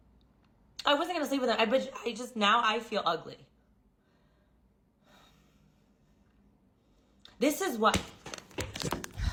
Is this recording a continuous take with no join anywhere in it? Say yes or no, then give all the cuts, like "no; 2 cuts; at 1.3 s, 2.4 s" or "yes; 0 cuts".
yes; 0 cuts